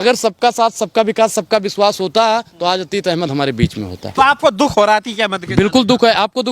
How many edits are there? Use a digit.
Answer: 1